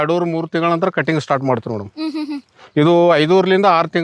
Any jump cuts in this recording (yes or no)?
no